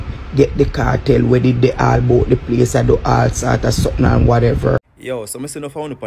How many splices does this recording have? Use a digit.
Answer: 1